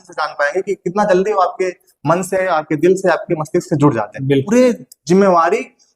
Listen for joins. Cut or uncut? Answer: cut